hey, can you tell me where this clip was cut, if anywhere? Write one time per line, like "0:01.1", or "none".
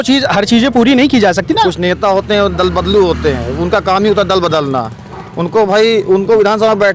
0:01.6

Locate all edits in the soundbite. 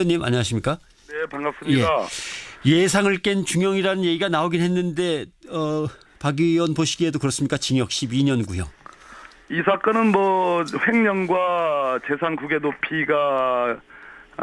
0:11.3

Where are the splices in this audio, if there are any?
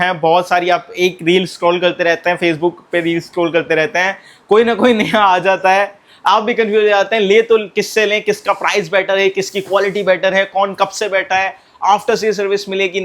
none

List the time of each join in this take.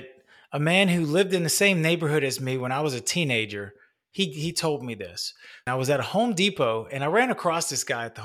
0:05.6

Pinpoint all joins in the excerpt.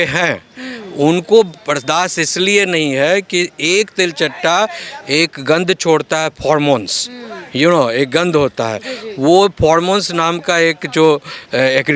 none

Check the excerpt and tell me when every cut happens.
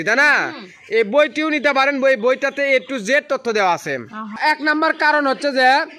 0:04.4

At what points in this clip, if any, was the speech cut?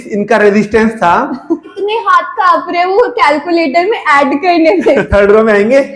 0:01.7
0:05.1

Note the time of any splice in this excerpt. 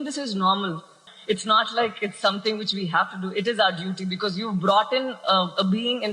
0:01.1

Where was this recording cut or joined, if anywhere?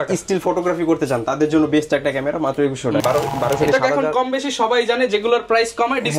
0:03.0

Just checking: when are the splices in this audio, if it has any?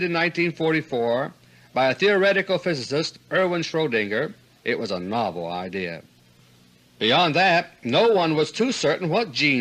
0:02.8

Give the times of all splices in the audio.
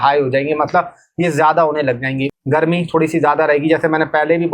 0:02.3

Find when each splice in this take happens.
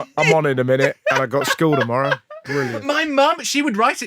0:02.8

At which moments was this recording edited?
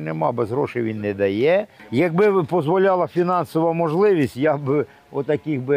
0:01.8

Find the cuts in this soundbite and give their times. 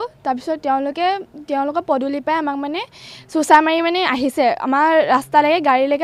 none

